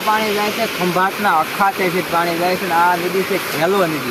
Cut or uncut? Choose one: uncut